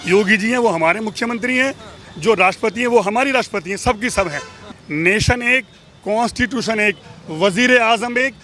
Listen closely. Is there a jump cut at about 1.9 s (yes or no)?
no